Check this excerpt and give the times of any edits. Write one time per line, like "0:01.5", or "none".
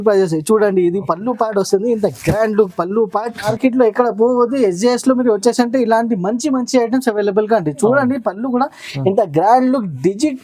0:03.5